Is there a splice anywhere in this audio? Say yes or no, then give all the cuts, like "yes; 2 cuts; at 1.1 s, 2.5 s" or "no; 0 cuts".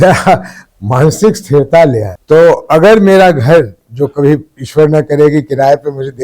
yes; 1 cut; at 2.1 s